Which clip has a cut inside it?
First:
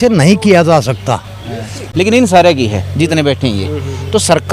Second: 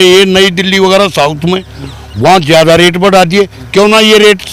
first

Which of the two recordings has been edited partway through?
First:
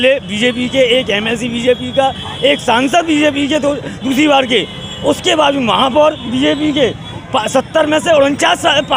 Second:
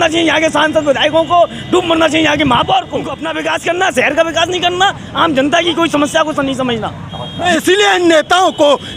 second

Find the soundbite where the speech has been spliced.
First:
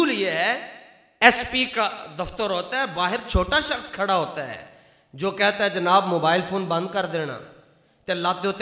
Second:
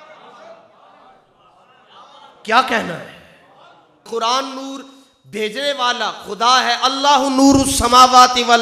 second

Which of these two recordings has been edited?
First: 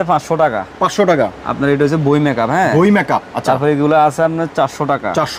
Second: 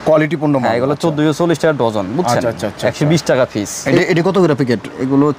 second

